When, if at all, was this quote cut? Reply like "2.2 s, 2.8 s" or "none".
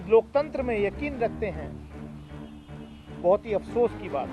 1.6 s, 3.0 s